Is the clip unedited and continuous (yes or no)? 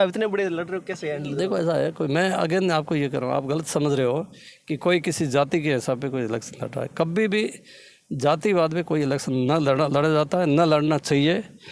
yes